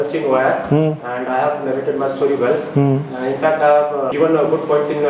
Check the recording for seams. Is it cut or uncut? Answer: cut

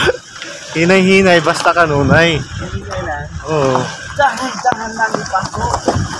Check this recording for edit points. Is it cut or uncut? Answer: uncut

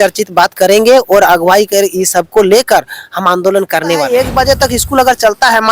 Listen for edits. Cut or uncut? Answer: cut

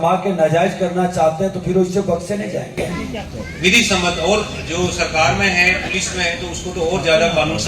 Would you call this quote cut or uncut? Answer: uncut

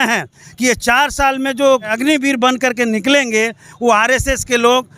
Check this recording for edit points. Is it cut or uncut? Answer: cut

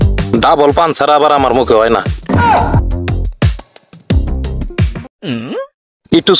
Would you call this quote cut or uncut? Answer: uncut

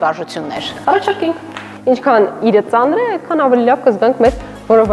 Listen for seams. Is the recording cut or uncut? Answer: cut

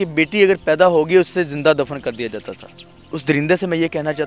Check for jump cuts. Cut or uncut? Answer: cut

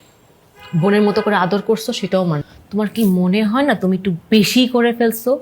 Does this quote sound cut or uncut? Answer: cut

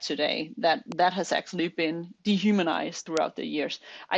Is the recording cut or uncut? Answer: cut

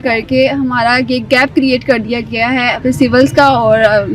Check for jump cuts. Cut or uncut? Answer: cut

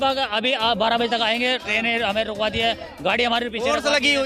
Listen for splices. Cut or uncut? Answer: uncut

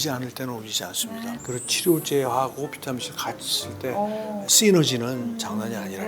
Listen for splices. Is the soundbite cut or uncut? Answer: cut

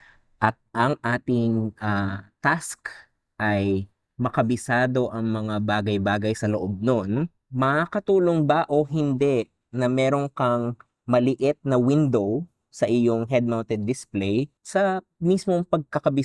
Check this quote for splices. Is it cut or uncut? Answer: cut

